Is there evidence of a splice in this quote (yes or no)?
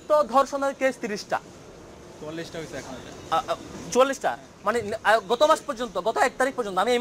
no